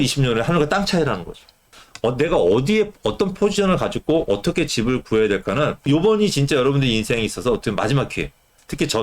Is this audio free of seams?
yes; 0 cuts

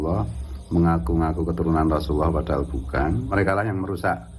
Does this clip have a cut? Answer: yes; 1 cut; at 3.3 s

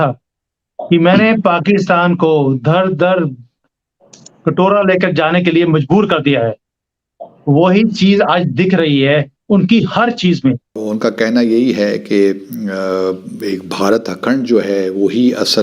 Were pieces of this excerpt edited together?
yes; 1 cut; at 10.8 s

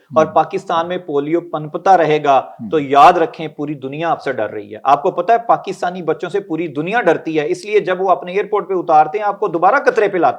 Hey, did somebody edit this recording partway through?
no; 0 cuts

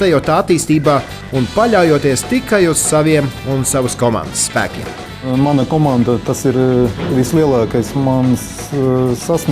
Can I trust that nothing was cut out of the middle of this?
yes; 0 cuts

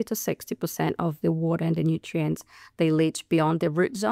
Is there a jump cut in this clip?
no; 0 cuts

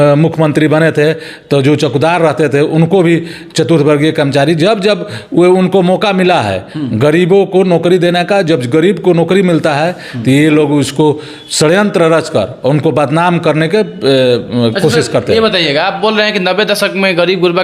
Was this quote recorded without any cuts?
yes; 0 cuts

